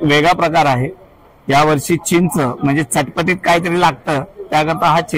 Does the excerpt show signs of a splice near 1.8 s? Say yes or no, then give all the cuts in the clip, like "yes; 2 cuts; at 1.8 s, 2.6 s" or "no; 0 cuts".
no; 0 cuts